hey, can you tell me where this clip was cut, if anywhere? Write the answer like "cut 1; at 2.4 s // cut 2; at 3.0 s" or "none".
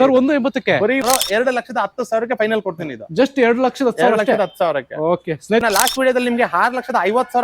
cut 1; at 1.0 s // cut 2; at 5.6 s